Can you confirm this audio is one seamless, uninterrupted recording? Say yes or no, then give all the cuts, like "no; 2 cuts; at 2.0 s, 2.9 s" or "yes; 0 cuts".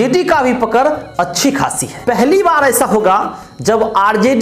no; 1 cut; at 1.9 s